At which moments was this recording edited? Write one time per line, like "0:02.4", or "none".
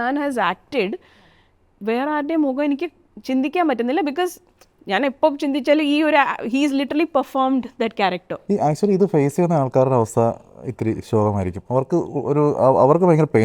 0:08.3